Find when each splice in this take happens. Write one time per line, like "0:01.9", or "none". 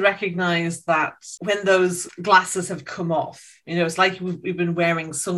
0:01.3
0:02.1